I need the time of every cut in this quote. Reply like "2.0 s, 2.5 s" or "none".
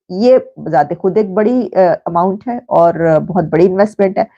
none